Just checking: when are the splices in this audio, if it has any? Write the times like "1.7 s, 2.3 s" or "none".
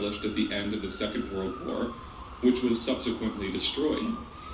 none